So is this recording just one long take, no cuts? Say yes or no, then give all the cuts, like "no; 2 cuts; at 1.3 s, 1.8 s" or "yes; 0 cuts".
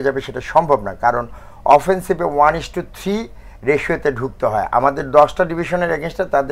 yes; 0 cuts